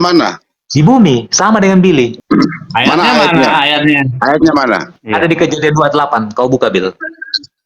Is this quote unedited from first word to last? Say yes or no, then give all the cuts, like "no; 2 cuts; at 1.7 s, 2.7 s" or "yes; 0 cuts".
no; 2 cuts; at 2.2 s, 4.9 s